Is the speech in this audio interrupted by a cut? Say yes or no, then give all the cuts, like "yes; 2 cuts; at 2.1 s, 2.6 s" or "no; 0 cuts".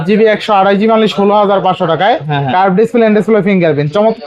no; 0 cuts